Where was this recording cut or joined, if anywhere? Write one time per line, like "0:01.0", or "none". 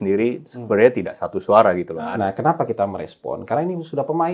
0:01.9